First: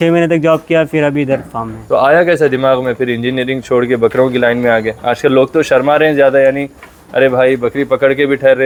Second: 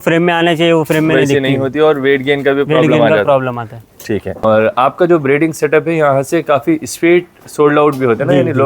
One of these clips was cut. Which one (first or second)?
second